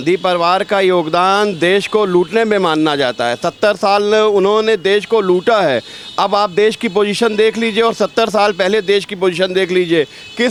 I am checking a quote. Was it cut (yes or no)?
no